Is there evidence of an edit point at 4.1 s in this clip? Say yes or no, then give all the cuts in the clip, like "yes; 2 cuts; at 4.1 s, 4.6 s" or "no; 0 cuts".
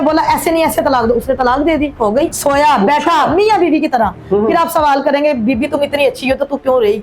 no; 1 cut; at 2.4 s